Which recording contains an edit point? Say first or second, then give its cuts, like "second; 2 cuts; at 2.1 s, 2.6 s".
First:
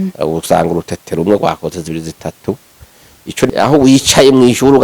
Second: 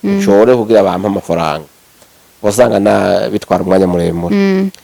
first; 1 cut; at 3.5 s